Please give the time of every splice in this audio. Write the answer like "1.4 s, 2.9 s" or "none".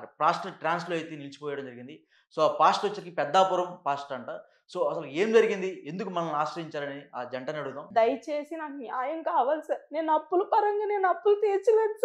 7.8 s